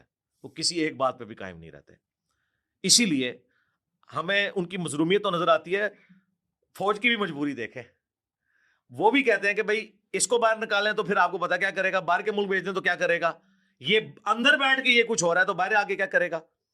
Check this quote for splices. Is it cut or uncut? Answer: uncut